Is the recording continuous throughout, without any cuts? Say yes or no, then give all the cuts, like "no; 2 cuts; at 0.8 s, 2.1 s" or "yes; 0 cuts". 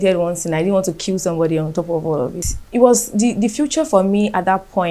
no; 1 cut; at 2.4 s